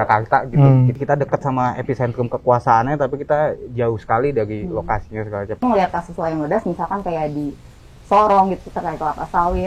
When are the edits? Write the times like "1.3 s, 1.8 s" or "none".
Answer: 0.9 s, 5.6 s